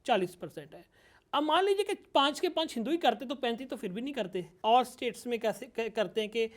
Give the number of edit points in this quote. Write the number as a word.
one